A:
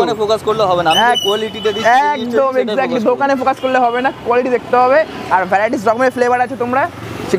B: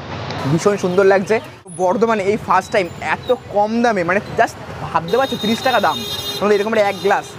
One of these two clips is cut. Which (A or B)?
B